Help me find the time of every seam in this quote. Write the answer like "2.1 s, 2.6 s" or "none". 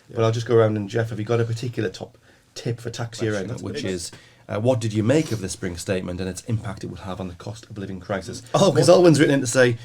3.6 s, 8.4 s